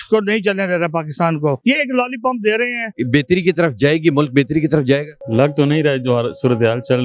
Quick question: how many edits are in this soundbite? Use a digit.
3